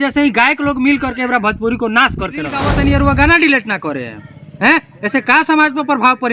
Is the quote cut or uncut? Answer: cut